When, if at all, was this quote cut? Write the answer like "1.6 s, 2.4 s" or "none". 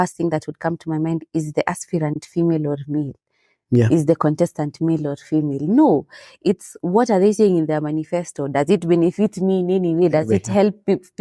none